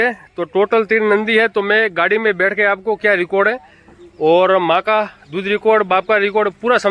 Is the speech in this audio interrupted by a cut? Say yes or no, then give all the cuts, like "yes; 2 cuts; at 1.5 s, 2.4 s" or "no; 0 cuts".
no; 0 cuts